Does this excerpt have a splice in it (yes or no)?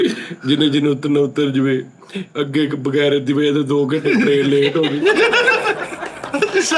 no